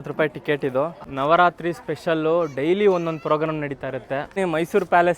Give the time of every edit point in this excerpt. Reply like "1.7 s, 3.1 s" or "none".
1.0 s, 4.4 s